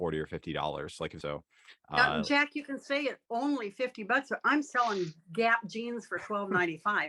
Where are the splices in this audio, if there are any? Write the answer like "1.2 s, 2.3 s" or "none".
1.2 s